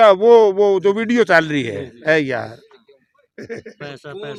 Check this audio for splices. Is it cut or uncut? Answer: uncut